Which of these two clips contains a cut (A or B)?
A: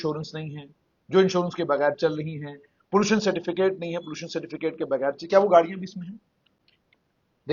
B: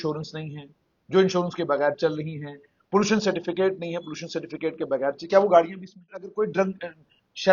B